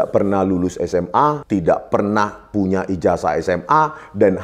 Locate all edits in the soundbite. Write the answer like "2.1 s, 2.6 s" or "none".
1.4 s